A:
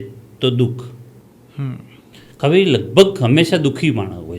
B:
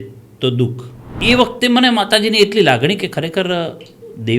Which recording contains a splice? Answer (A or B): B